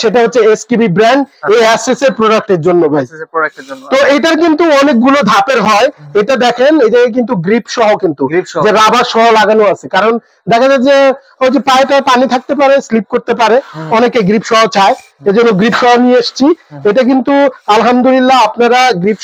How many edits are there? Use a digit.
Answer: 0